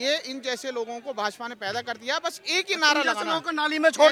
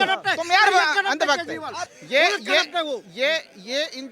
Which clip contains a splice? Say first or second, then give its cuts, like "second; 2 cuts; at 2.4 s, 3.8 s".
second; 1 cut; at 1.9 s